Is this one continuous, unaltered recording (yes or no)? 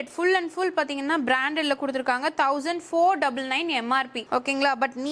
yes